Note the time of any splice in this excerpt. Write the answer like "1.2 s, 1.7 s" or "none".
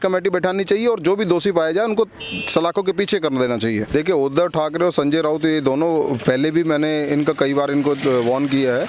3.8 s